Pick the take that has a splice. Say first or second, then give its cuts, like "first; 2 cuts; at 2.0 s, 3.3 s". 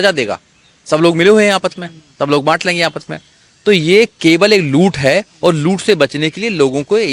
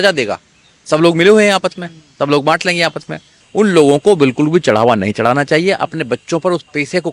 second; 1 cut; at 3.4 s